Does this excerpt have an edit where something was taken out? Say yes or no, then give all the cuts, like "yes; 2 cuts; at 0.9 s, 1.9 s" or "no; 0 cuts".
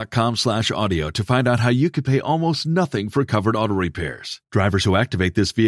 no; 0 cuts